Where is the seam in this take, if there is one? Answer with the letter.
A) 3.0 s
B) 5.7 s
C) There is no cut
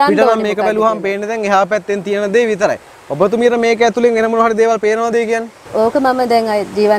B